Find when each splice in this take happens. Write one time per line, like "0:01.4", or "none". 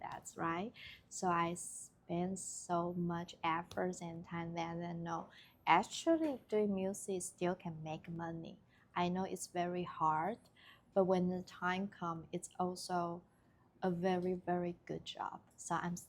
none